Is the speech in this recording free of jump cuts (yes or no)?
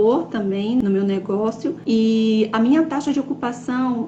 no